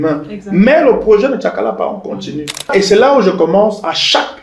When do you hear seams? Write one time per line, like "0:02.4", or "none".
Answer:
0:02.7